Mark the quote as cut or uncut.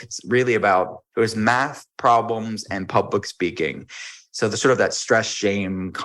cut